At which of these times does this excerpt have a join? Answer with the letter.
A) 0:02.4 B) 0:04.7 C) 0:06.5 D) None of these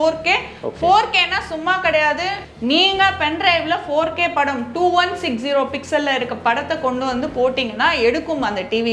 A